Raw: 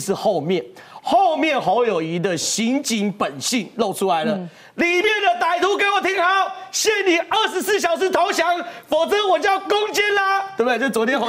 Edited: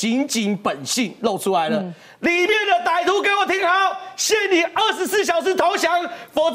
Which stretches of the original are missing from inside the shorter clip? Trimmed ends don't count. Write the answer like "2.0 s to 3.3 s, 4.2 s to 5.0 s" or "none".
none